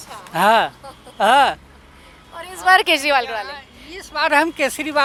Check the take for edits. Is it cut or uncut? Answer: uncut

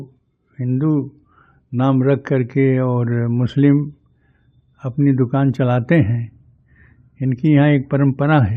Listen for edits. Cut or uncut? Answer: uncut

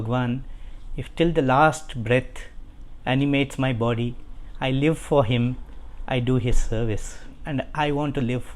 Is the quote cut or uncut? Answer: cut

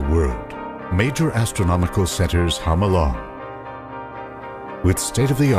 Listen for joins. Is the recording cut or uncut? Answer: uncut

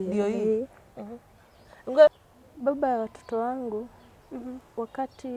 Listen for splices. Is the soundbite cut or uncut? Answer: cut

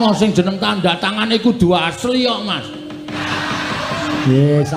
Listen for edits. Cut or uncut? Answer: cut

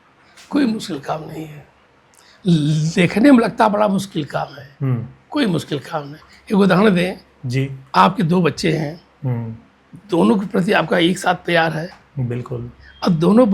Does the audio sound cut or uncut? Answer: uncut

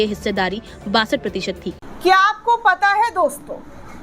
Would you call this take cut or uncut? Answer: cut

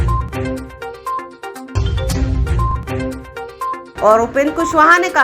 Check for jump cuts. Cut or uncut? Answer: cut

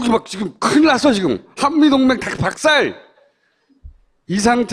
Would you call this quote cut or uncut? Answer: cut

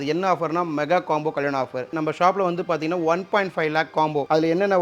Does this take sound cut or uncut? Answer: cut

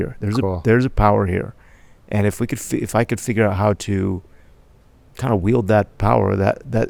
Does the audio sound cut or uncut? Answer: uncut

